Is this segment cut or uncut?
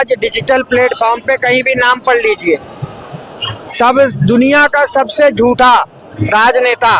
uncut